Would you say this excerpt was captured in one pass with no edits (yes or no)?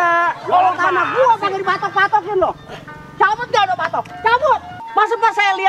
no